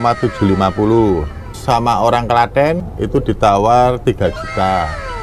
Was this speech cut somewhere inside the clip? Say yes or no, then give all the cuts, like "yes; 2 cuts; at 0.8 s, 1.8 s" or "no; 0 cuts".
yes; 2 cuts; at 1.6 s, 2.9 s